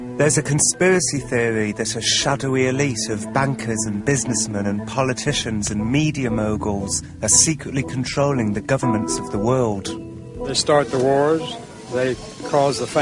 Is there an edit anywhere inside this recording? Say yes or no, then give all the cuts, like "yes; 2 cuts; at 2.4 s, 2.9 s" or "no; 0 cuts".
yes; 1 cut; at 5.2 s